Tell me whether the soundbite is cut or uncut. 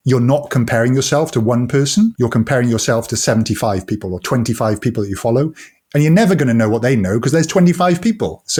uncut